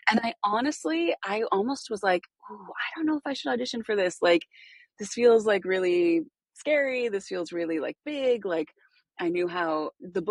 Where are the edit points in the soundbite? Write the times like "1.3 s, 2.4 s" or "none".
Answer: none

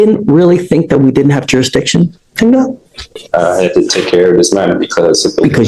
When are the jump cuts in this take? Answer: none

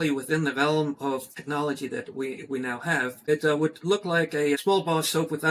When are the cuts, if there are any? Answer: 1.3 s, 3.2 s, 4.6 s

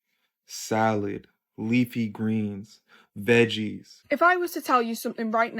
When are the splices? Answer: 3.9 s

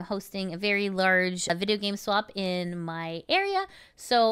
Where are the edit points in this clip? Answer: 1.5 s

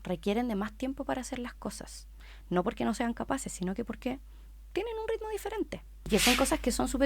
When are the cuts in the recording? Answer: 5.9 s

